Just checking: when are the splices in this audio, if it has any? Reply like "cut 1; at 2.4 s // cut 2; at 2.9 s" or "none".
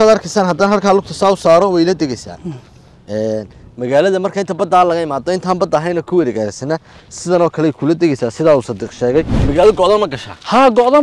cut 1; at 9.4 s